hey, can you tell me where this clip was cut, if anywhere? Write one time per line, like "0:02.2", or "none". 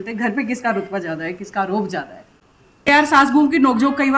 0:02.9

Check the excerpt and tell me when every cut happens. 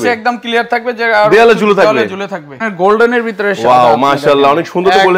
0:02.6

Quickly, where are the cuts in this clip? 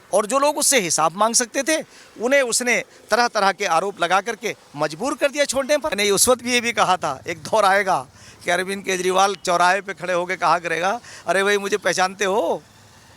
0:06.0

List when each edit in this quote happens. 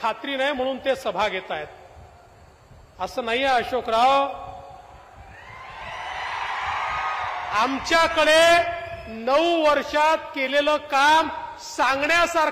none

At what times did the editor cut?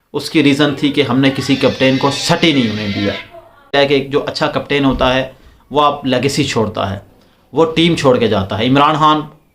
0:03.7

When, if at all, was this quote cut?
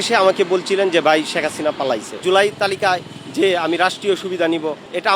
0:02.2

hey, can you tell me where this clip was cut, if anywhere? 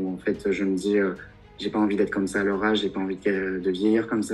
none

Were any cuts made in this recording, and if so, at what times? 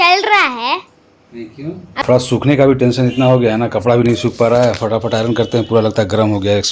0:02.0

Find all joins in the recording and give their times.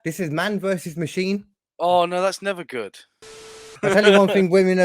0:01.6
0:03.2

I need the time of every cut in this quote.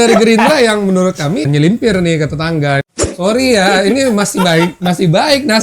0:01.5
0:02.8

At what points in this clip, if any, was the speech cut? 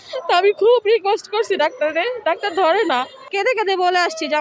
0:03.2

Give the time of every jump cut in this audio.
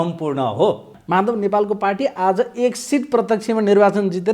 0:00.9

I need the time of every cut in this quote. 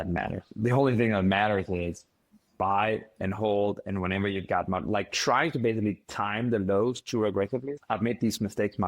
0:07.8

